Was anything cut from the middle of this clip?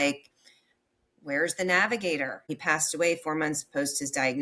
yes; 1 cut; at 2.5 s

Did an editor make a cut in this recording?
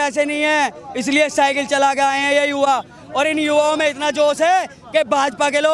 no; 0 cuts

